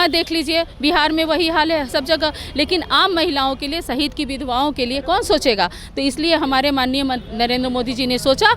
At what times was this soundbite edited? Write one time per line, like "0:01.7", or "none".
none